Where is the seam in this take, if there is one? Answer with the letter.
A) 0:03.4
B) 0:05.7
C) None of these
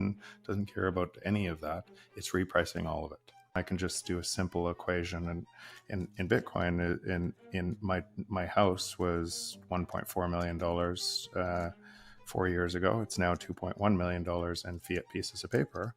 A